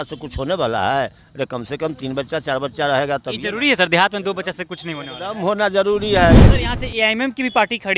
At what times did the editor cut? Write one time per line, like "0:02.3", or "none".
0:06.5